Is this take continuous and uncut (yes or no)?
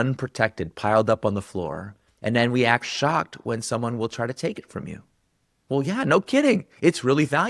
yes